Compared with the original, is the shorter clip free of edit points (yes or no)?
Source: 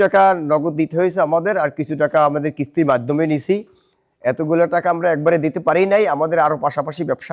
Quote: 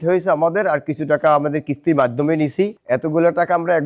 no